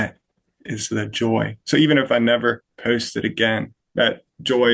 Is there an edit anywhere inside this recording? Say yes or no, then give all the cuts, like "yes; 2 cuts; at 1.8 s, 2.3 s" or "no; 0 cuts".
yes; 2 cuts; at 2.7 s, 3.8 s